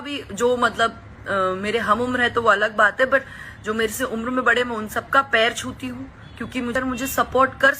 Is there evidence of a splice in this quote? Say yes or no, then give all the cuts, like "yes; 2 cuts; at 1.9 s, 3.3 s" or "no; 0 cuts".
yes; 1 cut; at 6.7 s